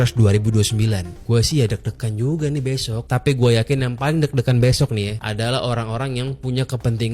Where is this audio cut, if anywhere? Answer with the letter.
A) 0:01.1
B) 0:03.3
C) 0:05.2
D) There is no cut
A